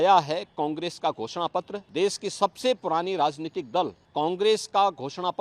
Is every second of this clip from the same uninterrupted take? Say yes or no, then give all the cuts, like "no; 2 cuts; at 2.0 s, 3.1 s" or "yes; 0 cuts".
no; 2 cuts; at 1.8 s, 4.0 s